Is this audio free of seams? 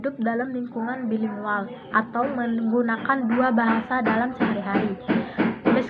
yes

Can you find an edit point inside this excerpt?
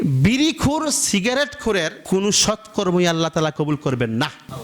yes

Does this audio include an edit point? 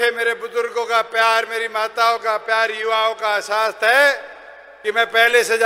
no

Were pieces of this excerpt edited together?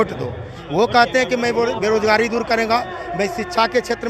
no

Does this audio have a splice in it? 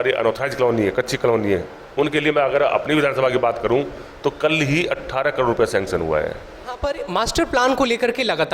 yes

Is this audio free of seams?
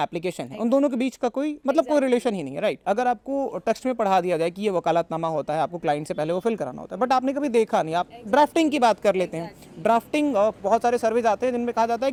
yes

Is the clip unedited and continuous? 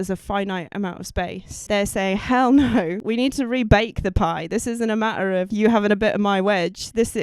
no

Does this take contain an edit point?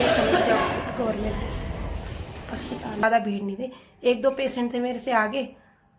yes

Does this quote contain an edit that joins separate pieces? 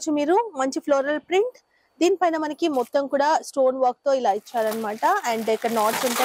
no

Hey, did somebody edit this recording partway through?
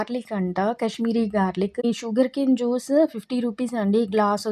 yes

